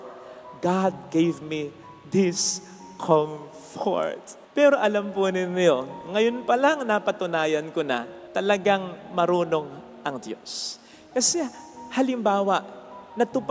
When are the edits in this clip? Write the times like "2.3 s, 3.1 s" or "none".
none